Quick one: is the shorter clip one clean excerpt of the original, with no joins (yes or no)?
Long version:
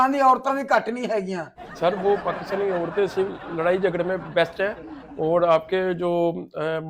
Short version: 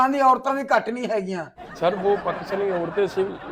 yes